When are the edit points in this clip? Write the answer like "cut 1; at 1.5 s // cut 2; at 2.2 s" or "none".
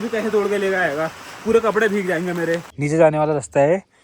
cut 1; at 2.7 s